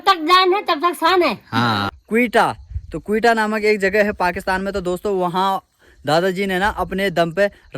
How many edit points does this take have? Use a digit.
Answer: 1